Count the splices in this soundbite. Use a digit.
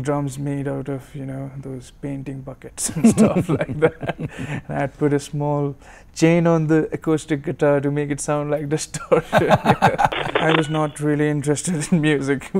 1